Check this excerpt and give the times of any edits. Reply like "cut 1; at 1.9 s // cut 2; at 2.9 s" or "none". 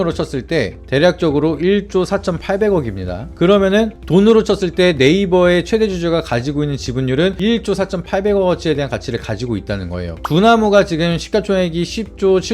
cut 1; at 10.2 s